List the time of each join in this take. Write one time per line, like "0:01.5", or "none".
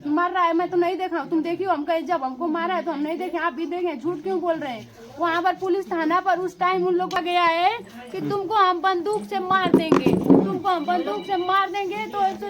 0:07.2